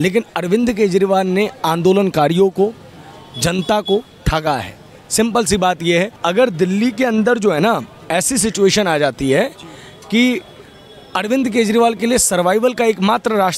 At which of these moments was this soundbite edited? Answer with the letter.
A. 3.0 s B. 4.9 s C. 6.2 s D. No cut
C